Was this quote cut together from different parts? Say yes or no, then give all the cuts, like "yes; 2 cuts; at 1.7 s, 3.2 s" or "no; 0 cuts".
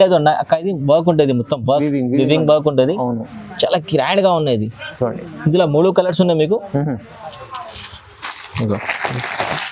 no; 0 cuts